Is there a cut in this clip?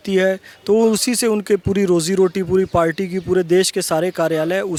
no; 0 cuts

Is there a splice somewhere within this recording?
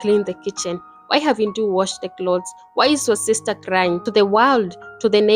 yes; 1 cut; at 4.0 s

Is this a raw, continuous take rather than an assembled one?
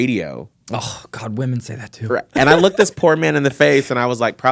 yes; 0 cuts

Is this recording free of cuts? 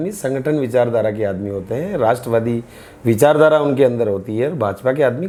yes; 0 cuts

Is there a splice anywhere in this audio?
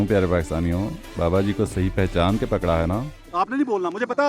yes; 1 cut; at 3.2 s

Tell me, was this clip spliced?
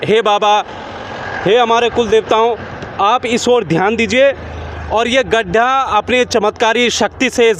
no; 0 cuts

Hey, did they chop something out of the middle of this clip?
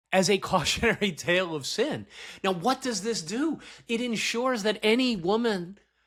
no; 0 cuts

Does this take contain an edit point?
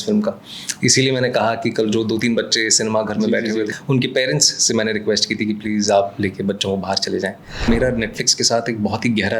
yes; 2 cuts; at 3.7 s, 7.7 s

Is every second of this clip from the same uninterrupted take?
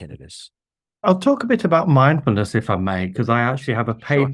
no; 1 cut; at 1.0 s

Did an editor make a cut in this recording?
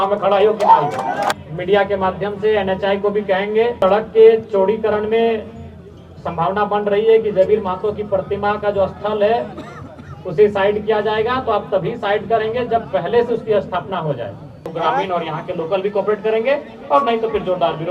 yes; 3 cuts; at 1.3 s, 3.8 s, 14.7 s

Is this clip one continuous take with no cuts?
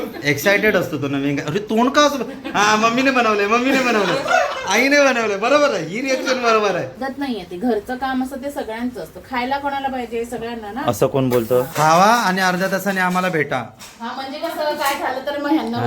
no; 2 cuts; at 7.0 s, 11.7 s

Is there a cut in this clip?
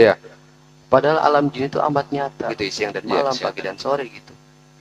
yes; 1 cut; at 2.5 s

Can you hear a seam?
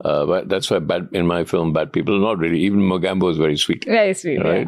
no; 0 cuts

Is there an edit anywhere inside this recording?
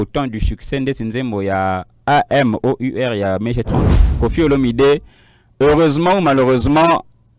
yes; 1 cut; at 4.2 s

